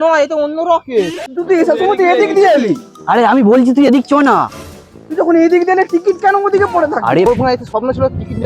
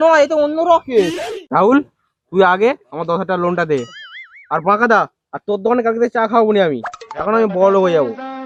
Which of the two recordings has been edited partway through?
first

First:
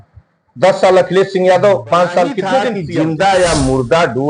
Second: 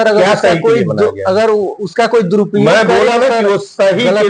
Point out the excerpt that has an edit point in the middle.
first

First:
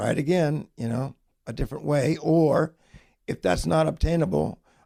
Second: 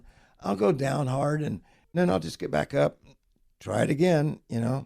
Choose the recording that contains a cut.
second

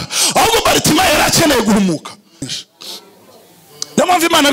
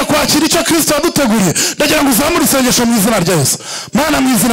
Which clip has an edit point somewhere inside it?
first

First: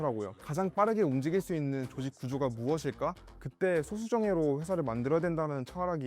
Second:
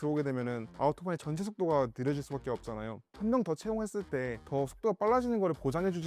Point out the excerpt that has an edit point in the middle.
first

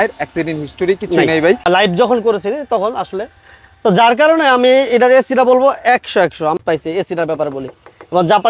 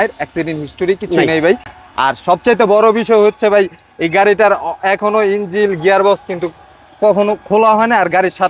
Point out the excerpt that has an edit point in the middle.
first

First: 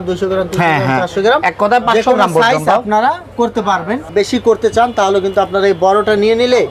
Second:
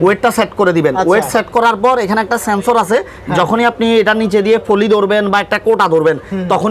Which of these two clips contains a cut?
first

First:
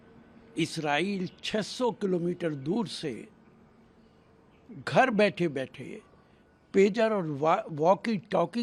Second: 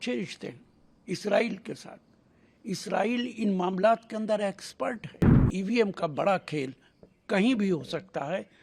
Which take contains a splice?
second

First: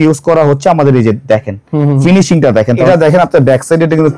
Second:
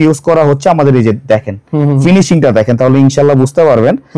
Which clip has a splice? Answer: first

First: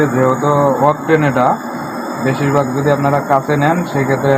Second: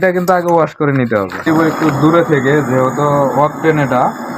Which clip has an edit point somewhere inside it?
second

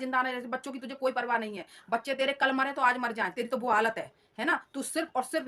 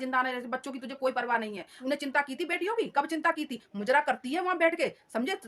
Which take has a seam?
second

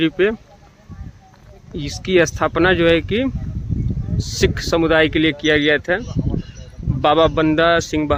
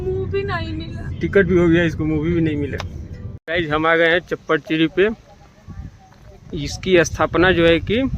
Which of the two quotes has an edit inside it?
second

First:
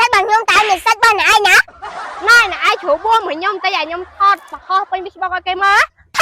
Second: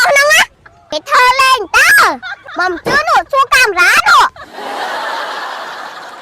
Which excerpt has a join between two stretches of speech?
second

